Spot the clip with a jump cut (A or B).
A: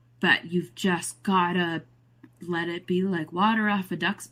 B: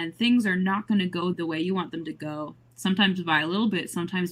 B